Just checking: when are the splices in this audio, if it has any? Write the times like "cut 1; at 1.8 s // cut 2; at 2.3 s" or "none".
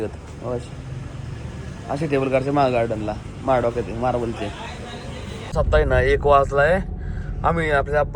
cut 1; at 5.3 s